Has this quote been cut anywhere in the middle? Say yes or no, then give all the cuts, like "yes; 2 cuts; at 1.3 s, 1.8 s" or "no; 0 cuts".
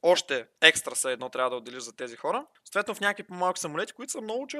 no; 0 cuts